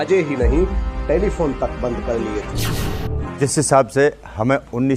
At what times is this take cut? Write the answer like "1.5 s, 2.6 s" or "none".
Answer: 2.8 s